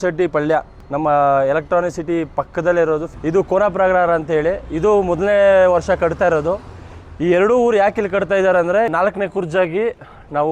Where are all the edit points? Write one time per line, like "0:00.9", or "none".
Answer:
0:03.1
0:08.9

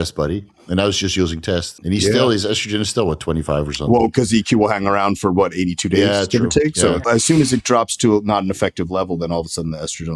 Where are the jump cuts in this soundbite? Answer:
0:01.7
0:07.0

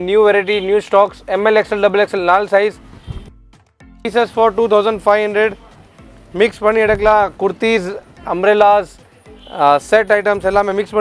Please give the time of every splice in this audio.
none

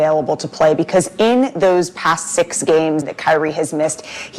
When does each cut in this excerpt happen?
0:03.1

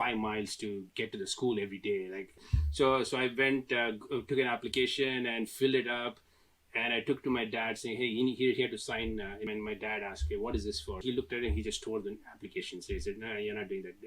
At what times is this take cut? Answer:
0:02.4
0:09.5
0:11.0

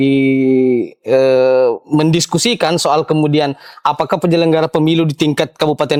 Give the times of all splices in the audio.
none

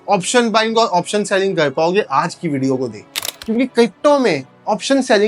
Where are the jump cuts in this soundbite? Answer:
0:03.4

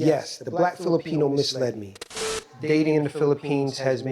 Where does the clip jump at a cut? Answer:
0:02.4

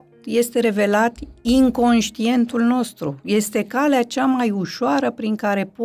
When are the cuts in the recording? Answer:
none

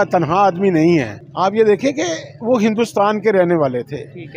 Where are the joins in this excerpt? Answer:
0:01.2

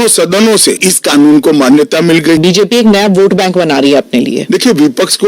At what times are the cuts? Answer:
0:00.8
0:02.4

